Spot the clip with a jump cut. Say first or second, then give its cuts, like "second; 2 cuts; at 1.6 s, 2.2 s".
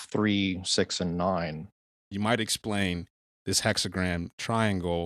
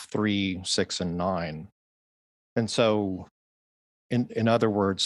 first; 1 cut; at 2.0 s